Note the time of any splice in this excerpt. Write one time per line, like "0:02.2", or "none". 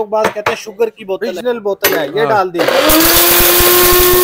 0:01.3
0:02.6

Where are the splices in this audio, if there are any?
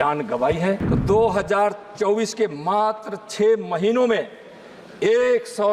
0:00.9

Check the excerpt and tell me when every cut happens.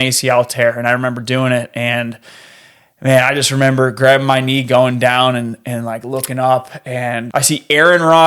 0:07.2

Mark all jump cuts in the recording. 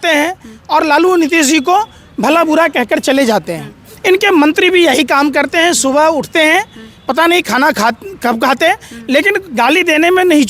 none

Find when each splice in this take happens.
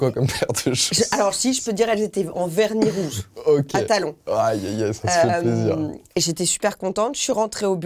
none

